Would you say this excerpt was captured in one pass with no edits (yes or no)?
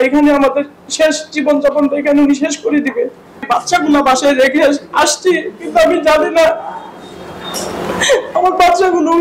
no